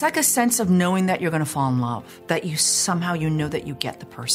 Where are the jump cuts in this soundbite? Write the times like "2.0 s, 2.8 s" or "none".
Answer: 2.1 s

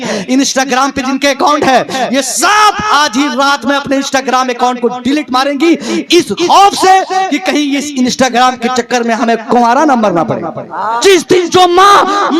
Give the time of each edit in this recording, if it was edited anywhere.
11.0 s

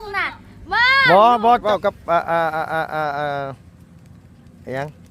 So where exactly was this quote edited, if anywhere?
1.6 s

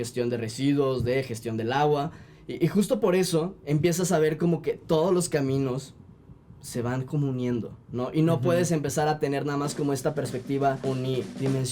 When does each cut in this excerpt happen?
10.8 s

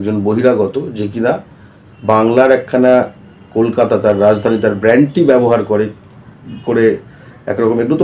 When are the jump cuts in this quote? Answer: none

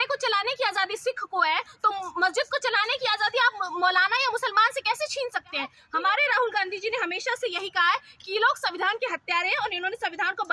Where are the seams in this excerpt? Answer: 5.8 s

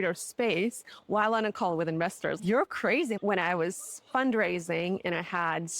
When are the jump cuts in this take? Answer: 2.4 s, 3.2 s

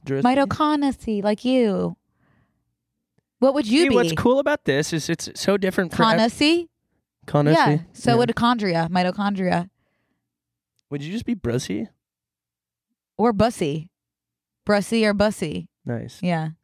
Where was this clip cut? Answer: 15.7 s

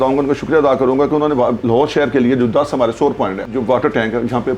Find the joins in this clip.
3.5 s

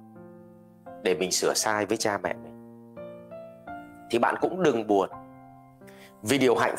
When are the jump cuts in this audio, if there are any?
2.5 s, 4.1 s

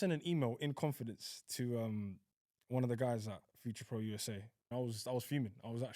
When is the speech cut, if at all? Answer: 4.6 s

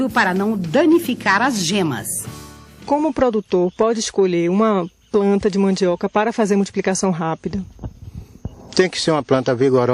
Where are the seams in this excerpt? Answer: none

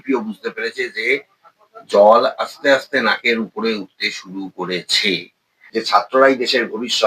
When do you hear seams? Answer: 5.5 s

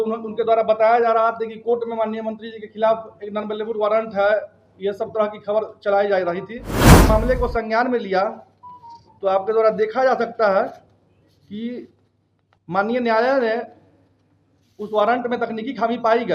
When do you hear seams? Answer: 7.0 s

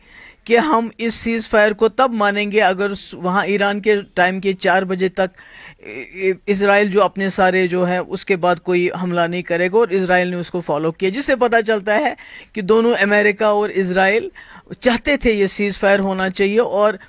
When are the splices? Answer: none

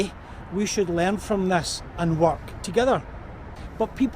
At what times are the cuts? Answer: none

